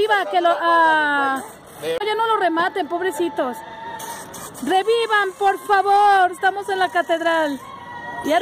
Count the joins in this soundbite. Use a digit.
1